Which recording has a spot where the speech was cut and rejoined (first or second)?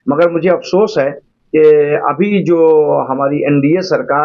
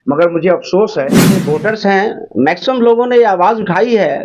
second